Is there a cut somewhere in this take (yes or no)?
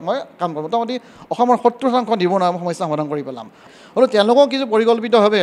yes